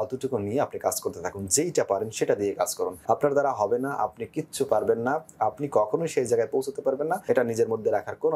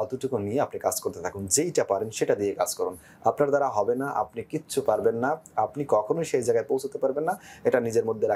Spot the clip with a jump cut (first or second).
first